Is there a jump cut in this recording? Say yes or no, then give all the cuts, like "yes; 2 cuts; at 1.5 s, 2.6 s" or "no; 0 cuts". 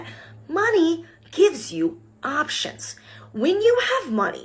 no; 0 cuts